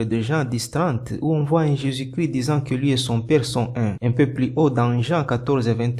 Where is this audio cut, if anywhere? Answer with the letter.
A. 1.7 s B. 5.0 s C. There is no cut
C